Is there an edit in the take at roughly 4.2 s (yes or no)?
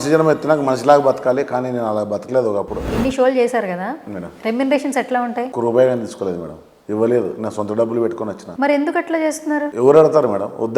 no